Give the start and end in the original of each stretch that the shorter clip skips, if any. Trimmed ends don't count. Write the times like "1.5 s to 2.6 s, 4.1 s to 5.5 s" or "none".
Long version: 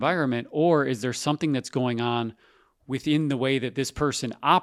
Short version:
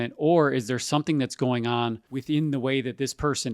2.4 s to 2.9 s